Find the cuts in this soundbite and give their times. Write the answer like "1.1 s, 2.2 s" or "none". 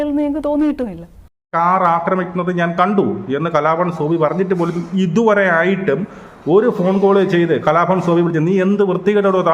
1.5 s